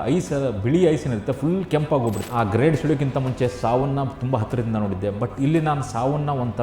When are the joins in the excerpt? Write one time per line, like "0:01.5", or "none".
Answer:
0:02.3